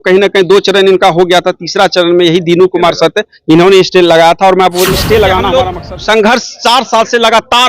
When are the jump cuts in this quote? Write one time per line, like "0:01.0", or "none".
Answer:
0:05.5

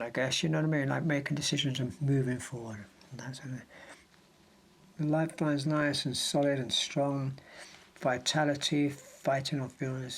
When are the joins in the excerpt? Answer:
0:04.1

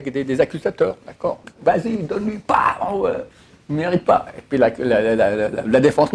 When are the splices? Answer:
0:01.5

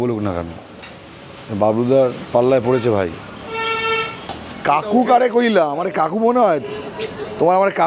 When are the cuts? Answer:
0:04.4

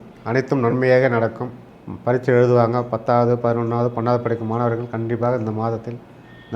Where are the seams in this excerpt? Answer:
0:01.5

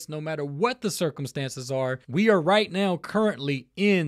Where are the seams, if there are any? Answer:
0:02.0

